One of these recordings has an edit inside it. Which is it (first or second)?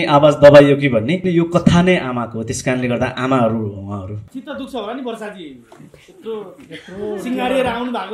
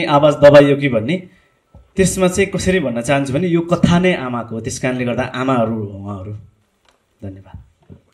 first